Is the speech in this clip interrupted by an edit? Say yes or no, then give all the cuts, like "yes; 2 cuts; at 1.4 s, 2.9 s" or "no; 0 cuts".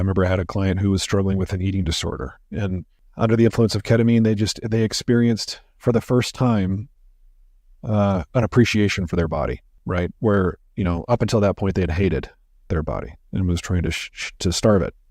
yes; 2 cuts; at 3.0 s, 9.7 s